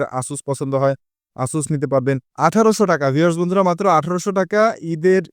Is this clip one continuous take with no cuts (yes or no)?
no